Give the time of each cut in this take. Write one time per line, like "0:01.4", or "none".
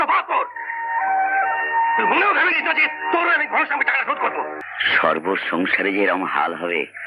0:04.6